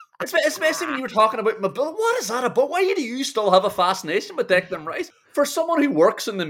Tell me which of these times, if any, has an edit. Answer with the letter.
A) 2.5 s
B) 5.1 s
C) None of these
B